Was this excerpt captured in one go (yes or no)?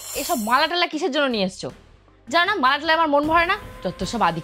no